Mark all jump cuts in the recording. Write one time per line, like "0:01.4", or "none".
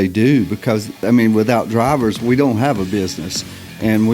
0:00.9